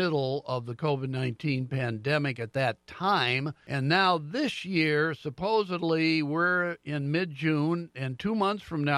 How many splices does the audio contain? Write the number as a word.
one